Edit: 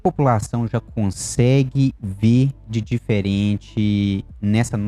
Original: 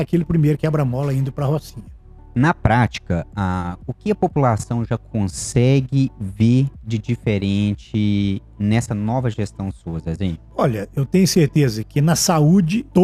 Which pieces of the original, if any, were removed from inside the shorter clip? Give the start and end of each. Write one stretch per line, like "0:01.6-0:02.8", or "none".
none